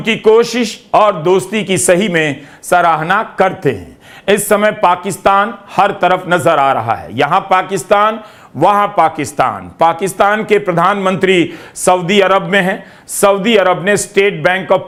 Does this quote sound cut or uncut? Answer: uncut